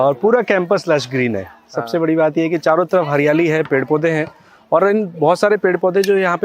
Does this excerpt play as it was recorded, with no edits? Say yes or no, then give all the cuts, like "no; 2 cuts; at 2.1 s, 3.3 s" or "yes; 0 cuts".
yes; 0 cuts